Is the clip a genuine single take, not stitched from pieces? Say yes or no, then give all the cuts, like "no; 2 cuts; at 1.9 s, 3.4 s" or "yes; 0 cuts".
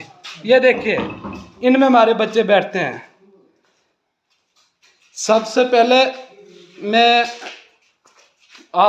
yes; 0 cuts